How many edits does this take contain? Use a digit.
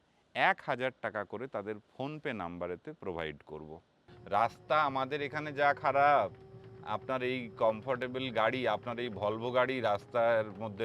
1